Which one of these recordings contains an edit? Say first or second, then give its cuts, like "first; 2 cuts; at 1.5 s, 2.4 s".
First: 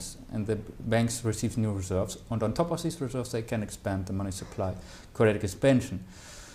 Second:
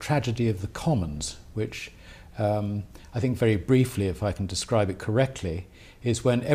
second; 1 cut; at 1.2 s